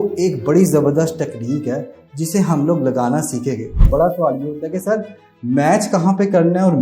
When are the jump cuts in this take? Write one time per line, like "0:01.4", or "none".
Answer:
0:03.8